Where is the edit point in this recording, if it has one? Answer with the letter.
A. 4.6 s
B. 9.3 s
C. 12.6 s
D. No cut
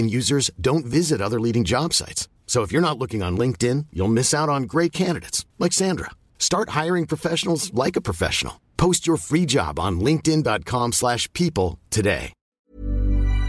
C